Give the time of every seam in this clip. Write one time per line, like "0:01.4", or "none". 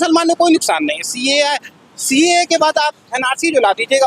none